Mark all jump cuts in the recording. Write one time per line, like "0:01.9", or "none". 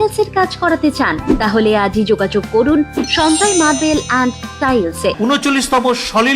0:05.1